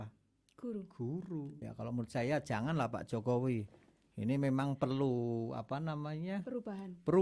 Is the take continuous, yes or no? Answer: no